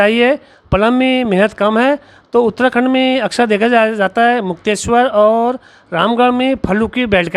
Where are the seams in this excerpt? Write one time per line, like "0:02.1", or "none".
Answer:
none

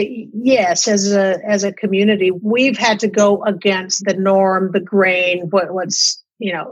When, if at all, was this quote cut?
0:02.4
0:04.0

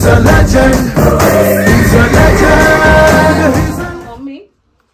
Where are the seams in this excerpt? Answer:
0:03.9

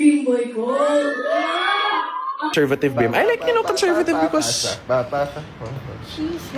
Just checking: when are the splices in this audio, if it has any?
0:02.5

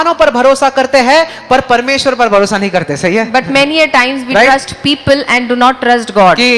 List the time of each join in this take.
none

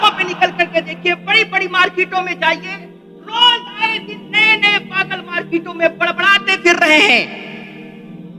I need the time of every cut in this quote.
0:07.3

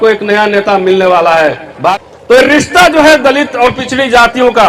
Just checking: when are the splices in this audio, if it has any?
0:01.9

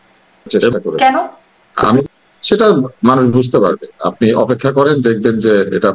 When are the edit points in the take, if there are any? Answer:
0:00.7
0:02.1

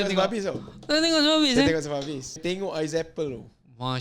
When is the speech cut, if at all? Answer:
0:02.3

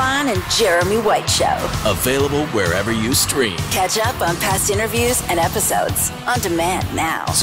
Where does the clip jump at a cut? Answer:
none

